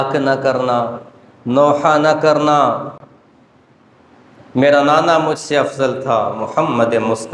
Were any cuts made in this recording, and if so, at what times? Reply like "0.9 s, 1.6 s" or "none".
none